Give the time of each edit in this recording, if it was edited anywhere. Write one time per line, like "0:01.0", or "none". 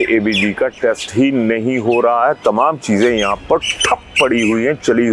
none